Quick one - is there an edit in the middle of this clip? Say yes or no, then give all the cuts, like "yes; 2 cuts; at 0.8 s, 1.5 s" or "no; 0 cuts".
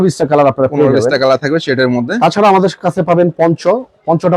no; 0 cuts